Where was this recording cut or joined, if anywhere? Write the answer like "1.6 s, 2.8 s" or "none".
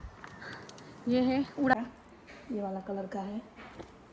1.7 s